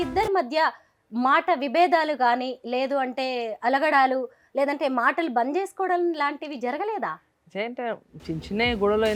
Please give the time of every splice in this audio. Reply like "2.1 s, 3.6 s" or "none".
none